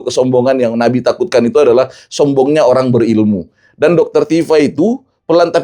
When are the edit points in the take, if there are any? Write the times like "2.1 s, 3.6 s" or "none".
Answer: none